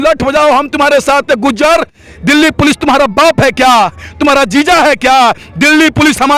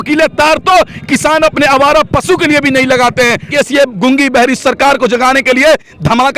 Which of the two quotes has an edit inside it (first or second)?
second